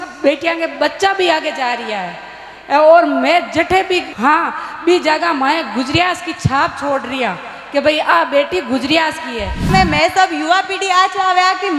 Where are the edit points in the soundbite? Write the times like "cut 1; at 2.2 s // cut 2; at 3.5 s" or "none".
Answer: cut 1; at 4.1 s // cut 2; at 9.7 s